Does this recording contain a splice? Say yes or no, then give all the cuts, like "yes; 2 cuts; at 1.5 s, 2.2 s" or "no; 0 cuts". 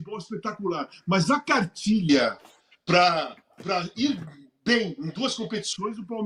no; 0 cuts